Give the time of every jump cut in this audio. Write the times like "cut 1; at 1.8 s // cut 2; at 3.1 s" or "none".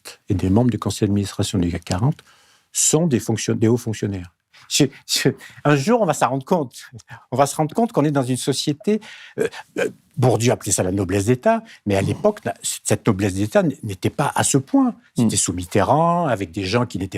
cut 1; at 4.6 s